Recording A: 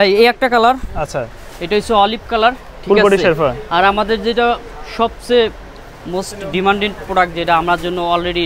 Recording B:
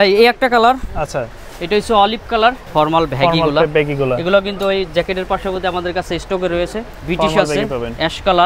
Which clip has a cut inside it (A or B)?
B